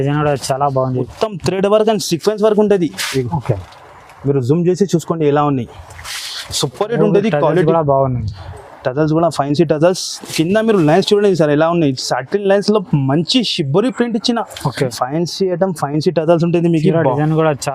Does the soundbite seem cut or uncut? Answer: cut